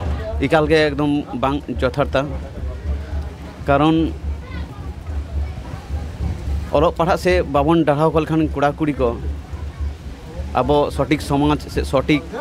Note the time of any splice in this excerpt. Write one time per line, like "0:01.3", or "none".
none